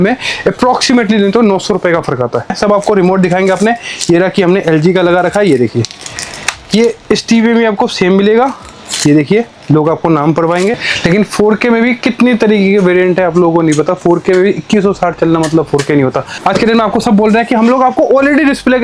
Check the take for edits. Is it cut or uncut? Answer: cut